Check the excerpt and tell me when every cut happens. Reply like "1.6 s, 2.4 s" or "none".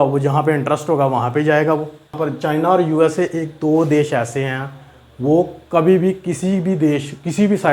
2.2 s